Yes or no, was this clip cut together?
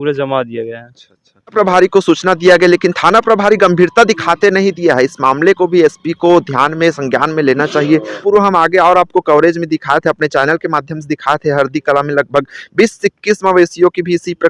yes